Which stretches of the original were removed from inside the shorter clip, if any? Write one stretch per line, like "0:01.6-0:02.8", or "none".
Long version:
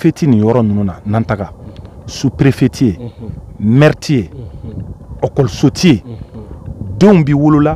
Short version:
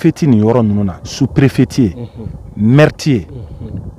0:01.0-0:02.0